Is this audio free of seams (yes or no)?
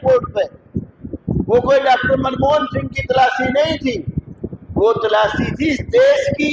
yes